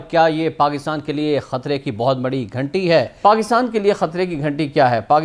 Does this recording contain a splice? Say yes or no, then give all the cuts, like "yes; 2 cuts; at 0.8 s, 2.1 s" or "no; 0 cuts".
no; 0 cuts